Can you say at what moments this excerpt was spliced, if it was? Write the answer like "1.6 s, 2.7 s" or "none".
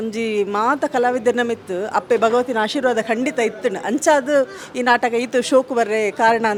none